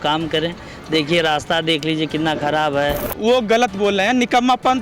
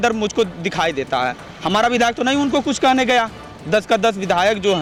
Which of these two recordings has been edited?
first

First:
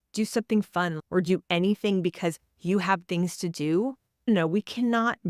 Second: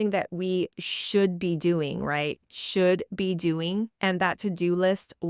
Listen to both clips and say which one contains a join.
first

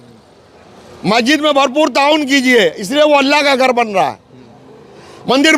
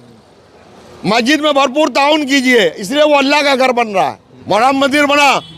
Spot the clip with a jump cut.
second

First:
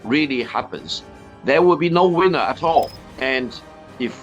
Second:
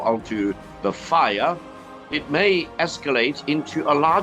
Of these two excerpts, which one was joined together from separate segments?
first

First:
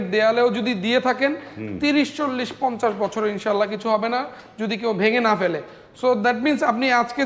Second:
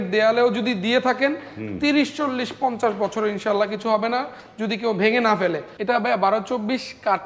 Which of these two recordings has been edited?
second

